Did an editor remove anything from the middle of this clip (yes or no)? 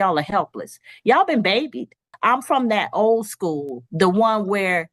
yes